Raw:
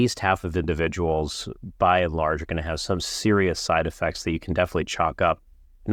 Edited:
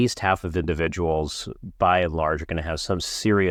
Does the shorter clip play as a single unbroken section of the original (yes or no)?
yes